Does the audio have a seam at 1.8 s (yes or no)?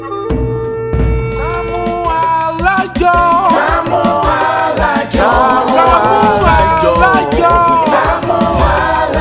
yes